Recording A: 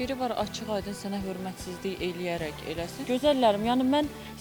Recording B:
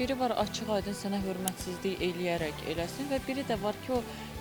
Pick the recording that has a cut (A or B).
A